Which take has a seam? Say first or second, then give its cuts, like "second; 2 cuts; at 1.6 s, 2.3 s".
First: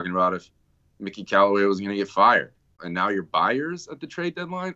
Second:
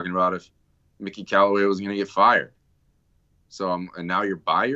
first; 1 cut; at 2.8 s